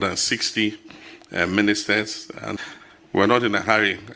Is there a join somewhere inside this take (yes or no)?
yes